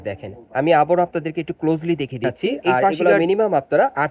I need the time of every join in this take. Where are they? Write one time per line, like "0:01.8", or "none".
0:03.0